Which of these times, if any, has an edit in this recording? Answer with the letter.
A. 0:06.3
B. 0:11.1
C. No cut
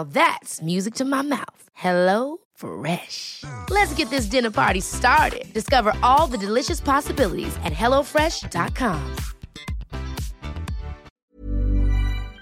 B